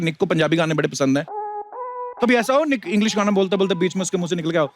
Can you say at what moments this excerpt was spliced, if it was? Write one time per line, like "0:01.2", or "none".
0:01.7